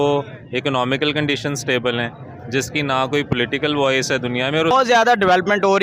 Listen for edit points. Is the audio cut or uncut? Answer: cut